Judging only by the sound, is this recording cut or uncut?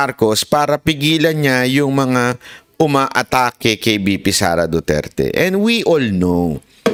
uncut